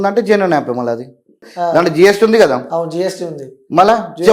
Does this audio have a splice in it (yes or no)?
yes